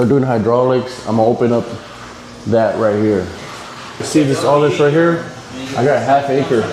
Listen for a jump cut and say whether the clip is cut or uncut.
cut